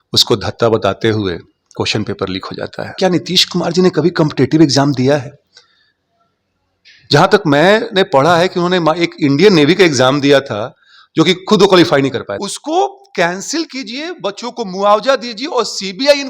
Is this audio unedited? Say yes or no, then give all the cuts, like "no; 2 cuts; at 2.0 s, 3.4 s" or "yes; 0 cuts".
no; 2 cuts; at 3.0 s, 12.5 s